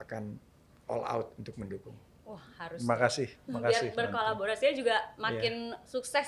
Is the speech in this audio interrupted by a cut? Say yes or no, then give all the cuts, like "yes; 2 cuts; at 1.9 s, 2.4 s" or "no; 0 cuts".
no; 0 cuts